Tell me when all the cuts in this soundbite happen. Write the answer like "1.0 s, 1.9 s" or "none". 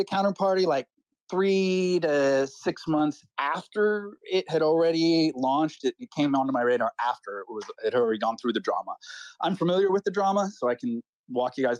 none